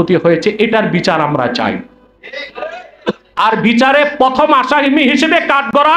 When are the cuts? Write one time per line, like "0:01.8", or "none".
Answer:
none